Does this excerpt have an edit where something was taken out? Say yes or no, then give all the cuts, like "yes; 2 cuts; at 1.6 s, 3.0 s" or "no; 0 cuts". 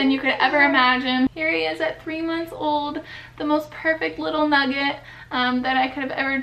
yes; 1 cut; at 1.3 s